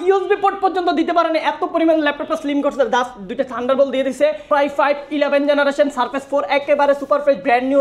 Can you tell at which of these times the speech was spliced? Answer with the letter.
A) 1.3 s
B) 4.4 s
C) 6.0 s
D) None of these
B